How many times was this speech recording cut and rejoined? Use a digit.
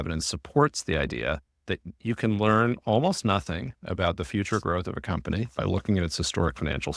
0